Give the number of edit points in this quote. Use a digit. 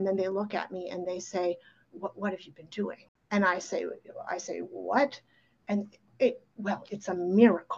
1